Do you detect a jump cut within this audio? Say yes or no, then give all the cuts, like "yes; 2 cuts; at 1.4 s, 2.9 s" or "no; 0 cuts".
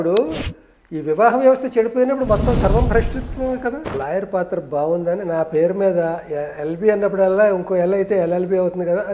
yes; 1 cut; at 3.9 s